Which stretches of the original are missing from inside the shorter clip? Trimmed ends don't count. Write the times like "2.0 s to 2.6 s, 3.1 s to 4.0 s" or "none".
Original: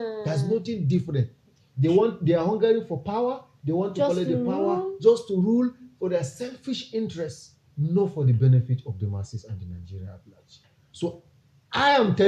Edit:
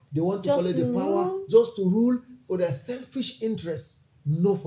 none

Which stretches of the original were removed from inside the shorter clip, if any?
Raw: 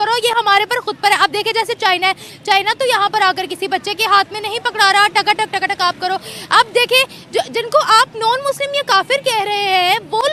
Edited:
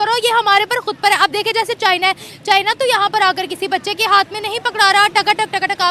none

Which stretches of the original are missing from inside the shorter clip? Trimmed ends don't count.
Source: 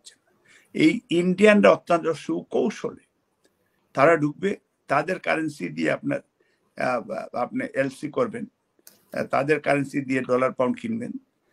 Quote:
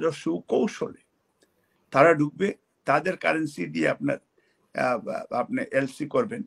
none

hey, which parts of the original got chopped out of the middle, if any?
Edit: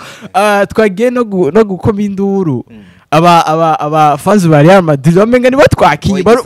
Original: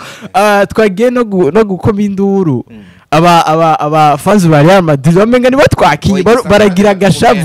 none

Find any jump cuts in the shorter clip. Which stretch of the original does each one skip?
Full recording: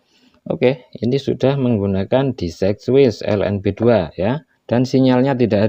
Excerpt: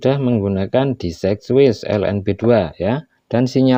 none

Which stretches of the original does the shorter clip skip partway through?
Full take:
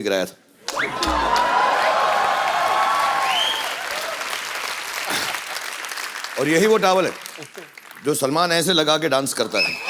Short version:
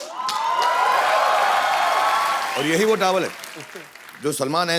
3.2 s to 6.3 s

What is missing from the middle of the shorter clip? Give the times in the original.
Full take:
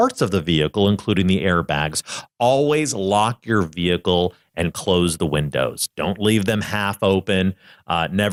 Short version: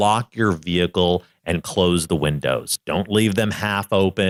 none

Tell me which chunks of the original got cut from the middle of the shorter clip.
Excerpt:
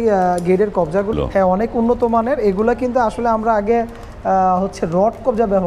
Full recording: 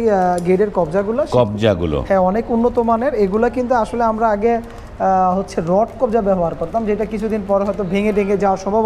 1.1 s to 1.9 s

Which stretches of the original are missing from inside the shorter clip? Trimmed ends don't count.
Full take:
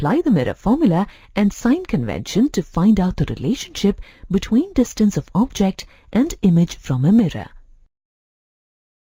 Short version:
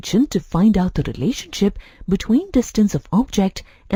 none

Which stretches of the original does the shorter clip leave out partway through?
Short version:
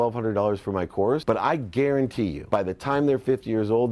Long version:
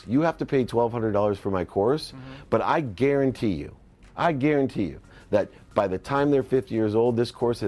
2.0 s to 2.5 s, 3.6 s to 5.6 s

